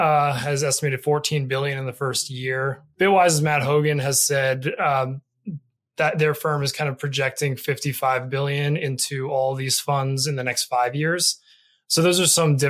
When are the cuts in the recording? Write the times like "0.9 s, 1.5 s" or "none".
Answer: 2.9 s